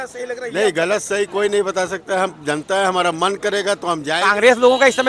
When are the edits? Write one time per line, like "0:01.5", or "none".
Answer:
0:04.1